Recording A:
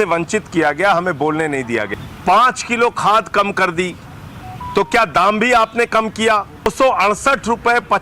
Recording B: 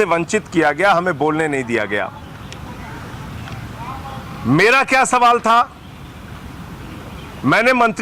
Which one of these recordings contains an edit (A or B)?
A